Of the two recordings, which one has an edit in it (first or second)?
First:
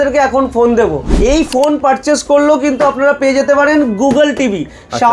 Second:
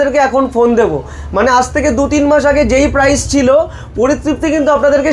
first